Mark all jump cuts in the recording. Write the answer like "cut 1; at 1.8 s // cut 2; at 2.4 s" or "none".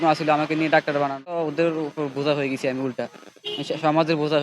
cut 1; at 1.5 s